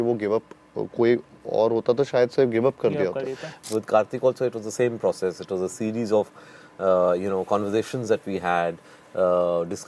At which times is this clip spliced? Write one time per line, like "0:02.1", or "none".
0:03.5

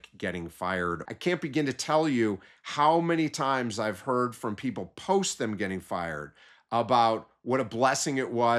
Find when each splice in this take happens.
0:01.0

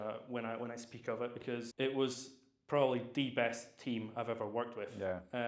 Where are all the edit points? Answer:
0:01.7

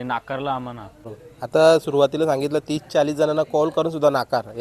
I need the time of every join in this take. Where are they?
0:01.2

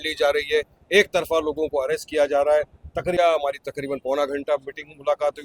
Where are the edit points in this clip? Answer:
0:03.2

